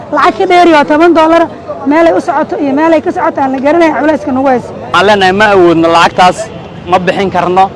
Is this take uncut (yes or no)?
no